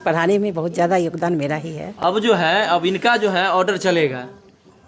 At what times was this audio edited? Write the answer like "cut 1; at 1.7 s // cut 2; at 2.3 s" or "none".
none